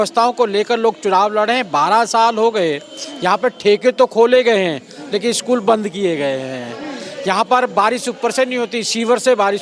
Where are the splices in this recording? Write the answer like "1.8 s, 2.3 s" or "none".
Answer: none